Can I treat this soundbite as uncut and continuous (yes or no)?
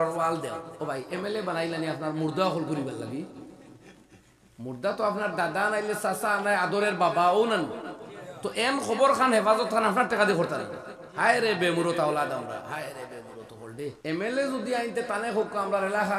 no